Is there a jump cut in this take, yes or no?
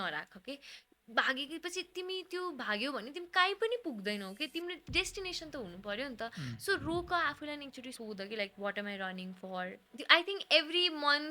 yes